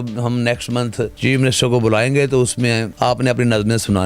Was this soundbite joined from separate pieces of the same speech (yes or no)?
yes